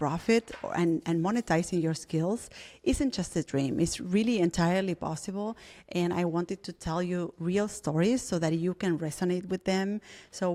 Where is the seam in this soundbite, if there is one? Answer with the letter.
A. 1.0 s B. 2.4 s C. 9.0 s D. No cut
D